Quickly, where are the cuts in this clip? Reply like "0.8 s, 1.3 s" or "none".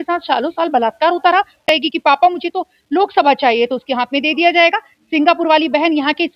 1.6 s